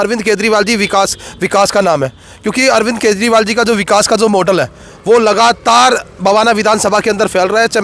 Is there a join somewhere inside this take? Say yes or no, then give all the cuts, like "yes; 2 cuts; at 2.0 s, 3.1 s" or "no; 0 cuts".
no; 0 cuts